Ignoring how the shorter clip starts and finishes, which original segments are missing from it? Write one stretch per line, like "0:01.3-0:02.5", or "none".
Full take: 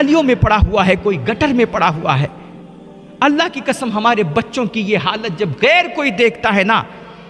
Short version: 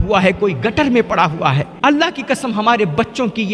0:02.3-0:03.1